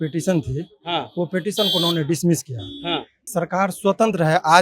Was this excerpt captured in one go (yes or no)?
no